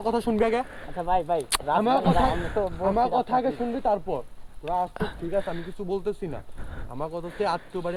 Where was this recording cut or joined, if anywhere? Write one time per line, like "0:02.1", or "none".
none